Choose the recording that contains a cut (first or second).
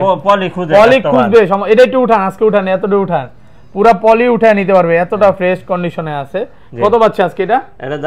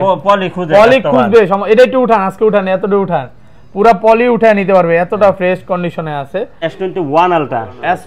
second